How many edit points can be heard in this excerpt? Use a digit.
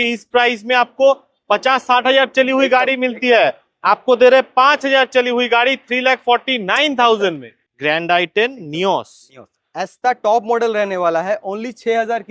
1